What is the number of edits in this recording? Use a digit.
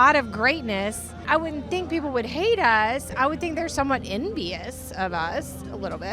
1